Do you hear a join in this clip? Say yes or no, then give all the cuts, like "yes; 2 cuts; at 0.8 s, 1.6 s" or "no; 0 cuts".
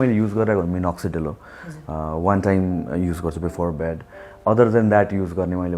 no; 0 cuts